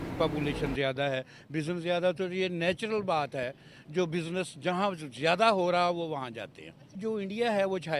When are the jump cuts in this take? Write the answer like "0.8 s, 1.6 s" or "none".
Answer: 6.9 s